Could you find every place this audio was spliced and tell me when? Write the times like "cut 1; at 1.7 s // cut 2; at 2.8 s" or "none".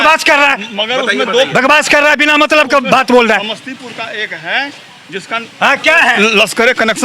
none